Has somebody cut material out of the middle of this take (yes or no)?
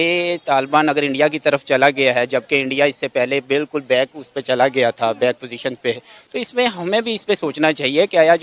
no